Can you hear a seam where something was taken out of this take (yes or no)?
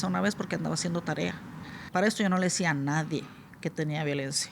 yes